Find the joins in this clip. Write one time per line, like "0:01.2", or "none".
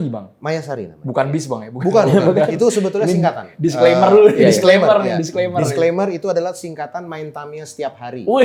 none